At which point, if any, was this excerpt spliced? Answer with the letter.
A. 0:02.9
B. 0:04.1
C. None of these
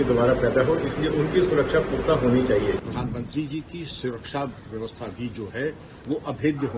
A